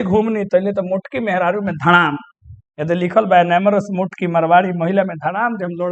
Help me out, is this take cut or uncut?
uncut